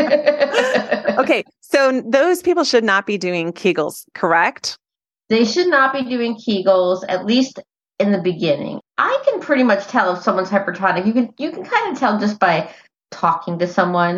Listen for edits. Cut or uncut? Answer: cut